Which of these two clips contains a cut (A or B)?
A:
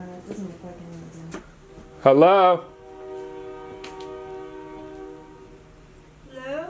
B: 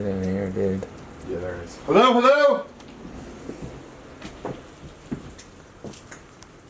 A